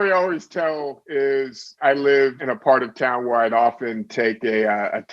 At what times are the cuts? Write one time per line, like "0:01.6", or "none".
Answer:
0:01.0
0:01.8
0:02.4